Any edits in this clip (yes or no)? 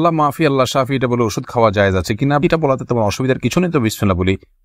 no